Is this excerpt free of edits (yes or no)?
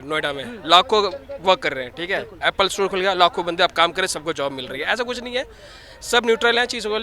yes